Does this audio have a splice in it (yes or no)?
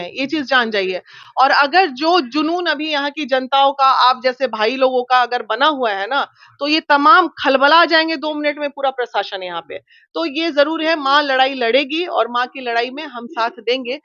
no